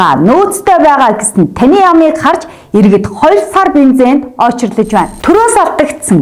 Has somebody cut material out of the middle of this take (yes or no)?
yes